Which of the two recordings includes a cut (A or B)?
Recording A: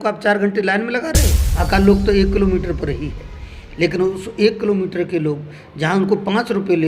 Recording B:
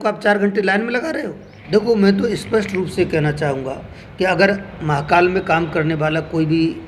A